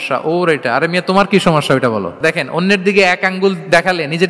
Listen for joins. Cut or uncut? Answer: cut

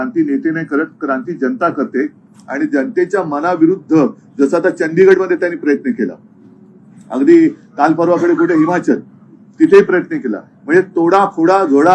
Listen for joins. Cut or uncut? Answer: uncut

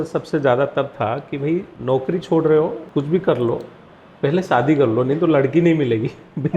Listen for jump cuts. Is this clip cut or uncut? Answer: cut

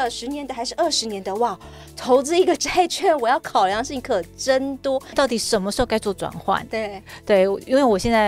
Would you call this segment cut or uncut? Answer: cut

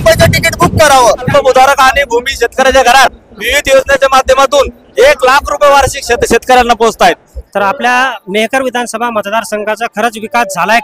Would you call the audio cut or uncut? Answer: cut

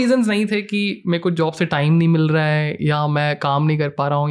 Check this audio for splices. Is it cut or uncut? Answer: uncut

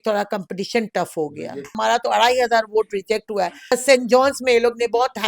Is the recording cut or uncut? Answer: cut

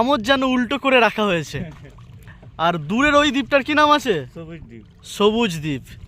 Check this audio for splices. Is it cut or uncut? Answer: uncut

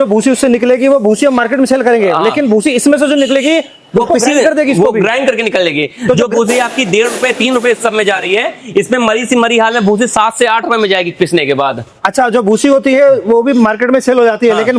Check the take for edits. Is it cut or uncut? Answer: uncut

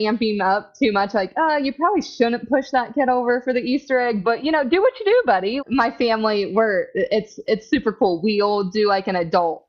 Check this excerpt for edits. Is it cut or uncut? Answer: cut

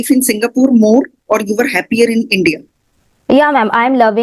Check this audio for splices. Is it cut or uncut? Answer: uncut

